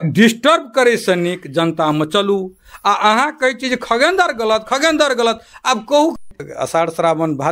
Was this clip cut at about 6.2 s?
yes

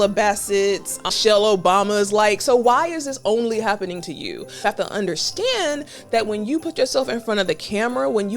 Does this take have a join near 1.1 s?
yes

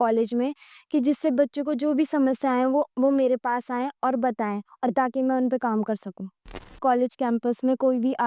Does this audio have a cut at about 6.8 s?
yes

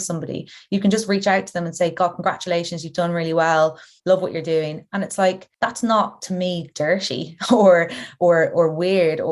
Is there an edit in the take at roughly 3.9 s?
yes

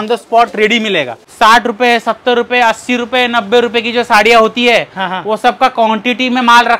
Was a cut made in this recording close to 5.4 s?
no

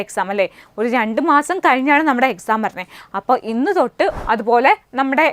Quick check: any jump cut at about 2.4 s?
no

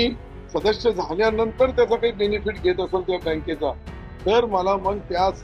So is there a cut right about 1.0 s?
no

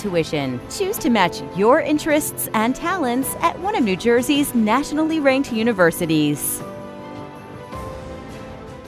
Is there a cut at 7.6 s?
no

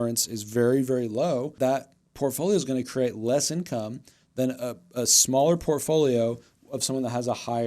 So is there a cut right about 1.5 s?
yes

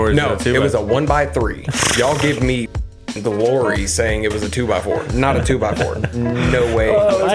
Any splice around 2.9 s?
no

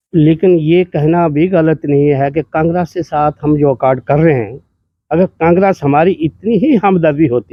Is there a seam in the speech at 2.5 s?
no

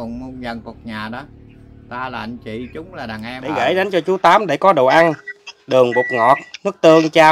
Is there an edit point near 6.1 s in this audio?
no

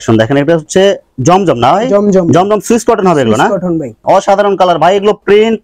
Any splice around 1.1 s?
no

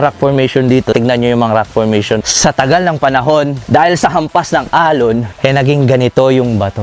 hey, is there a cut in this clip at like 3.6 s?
yes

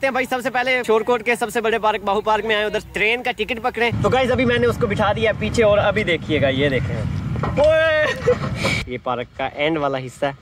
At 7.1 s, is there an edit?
no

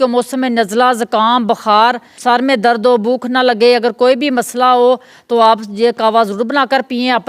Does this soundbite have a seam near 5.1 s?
no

